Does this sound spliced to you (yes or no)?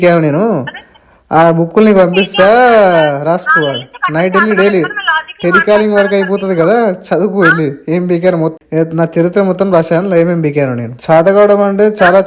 yes